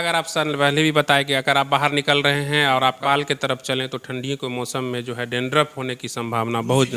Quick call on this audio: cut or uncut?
cut